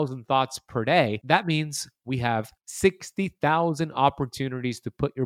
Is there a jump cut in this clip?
yes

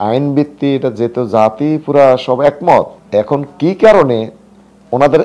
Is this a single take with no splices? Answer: no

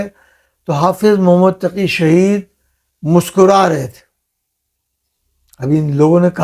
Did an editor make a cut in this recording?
no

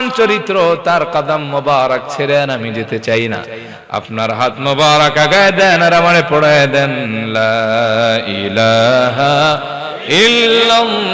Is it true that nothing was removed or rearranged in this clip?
yes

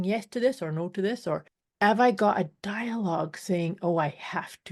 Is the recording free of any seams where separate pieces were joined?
no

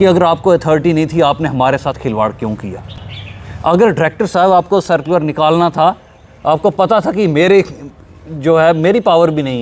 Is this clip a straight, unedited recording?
yes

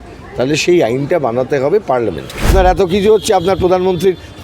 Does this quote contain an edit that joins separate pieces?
yes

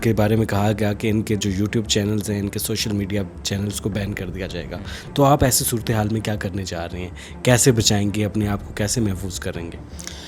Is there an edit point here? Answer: no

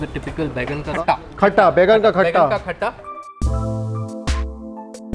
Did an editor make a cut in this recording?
no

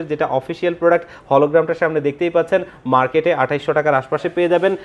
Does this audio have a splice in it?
no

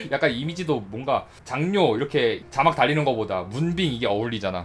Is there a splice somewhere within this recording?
yes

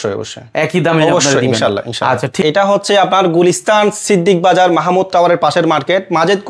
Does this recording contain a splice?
yes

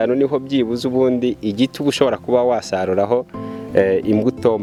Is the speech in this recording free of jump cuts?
yes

